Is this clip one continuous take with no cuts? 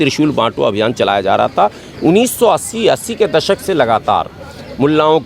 yes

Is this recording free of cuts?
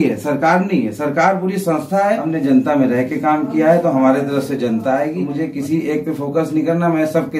no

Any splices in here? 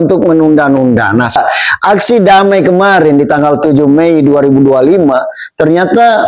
yes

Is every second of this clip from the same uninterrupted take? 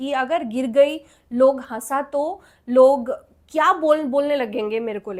yes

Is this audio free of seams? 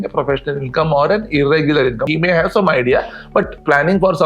no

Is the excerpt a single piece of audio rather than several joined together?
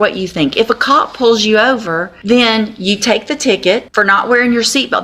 no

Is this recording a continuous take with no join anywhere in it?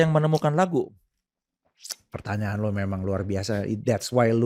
yes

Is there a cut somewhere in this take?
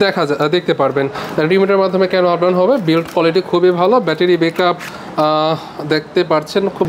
no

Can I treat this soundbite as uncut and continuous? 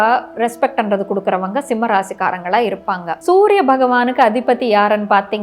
no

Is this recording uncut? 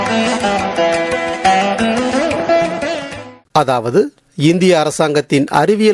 no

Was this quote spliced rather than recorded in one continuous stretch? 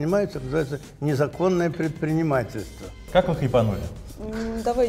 yes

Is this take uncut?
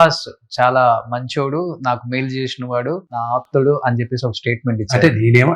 no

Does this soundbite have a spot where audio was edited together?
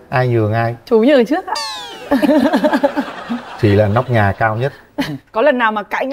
no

